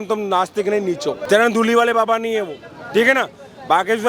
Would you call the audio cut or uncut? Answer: cut